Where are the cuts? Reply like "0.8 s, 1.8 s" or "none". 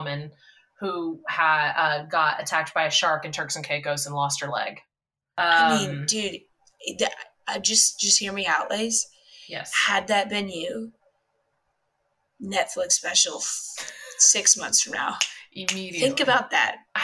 4.6 s